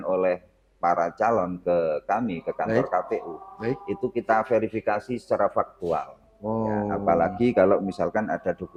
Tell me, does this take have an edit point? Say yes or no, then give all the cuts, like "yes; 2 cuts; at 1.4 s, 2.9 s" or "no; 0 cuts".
no; 0 cuts